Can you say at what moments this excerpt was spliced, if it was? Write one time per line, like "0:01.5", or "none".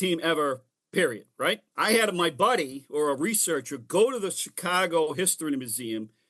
0:01.7